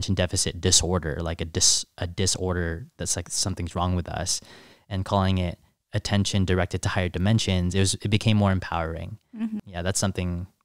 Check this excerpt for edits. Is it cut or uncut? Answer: cut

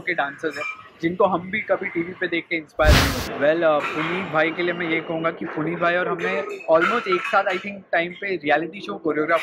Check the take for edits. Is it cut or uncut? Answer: cut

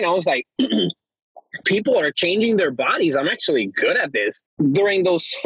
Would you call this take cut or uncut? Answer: cut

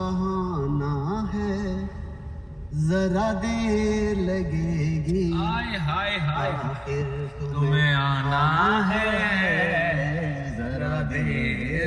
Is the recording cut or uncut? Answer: uncut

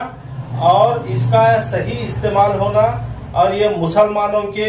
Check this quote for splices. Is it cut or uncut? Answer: uncut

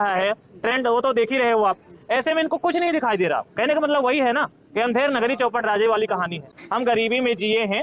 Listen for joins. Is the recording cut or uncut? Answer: cut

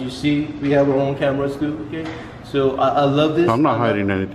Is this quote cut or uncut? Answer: uncut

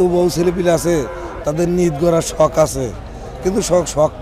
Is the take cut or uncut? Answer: uncut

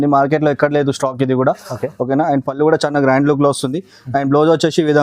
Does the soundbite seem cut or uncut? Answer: uncut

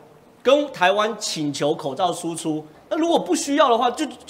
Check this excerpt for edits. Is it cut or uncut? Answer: cut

